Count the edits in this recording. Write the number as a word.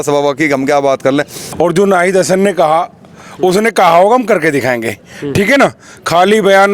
one